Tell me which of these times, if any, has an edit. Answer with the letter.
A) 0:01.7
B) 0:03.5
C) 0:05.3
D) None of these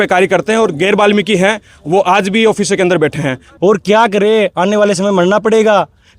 B